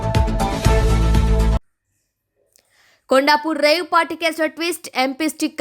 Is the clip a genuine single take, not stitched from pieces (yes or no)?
yes